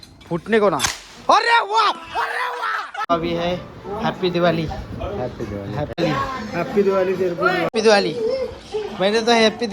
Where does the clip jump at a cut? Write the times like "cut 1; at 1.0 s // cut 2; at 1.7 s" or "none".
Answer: cut 1; at 3.1 s // cut 2; at 6.0 s // cut 3; at 7.7 s